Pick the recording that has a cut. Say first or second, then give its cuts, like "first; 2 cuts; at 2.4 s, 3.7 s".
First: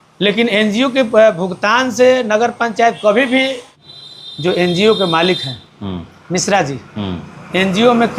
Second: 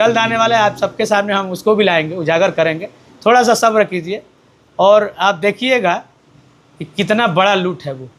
first; 1 cut; at 3.8 s